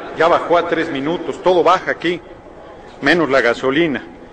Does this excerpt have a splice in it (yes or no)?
yes